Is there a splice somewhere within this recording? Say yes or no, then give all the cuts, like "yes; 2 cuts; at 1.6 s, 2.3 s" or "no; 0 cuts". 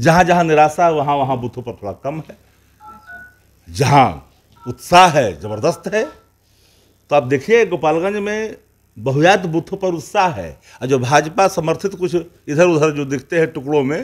no; 0 cuts